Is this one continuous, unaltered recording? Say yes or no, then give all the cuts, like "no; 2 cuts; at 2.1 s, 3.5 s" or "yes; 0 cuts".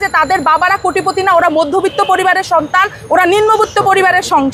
yes; 0 cuts